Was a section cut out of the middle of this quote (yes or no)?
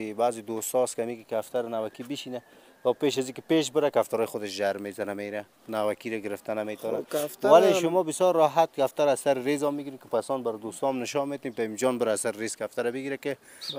no